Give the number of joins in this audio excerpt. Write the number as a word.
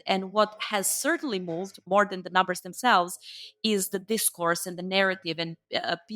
one